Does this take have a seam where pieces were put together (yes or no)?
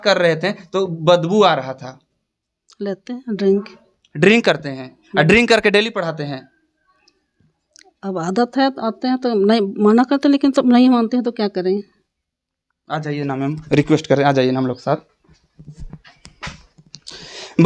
no